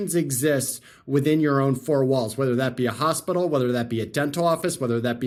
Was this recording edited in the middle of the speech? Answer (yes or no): no